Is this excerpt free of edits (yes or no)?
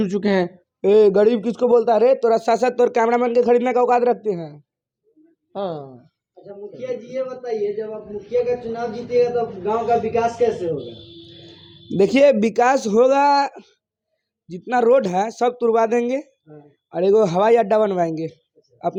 yes